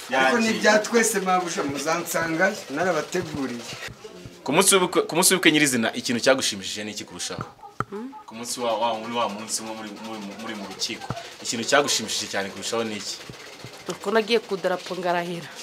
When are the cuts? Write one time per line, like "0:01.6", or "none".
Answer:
0:03.8